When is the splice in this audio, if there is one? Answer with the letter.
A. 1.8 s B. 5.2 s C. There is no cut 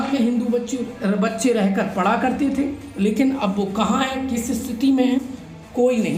C